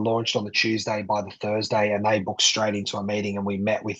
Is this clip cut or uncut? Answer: uncut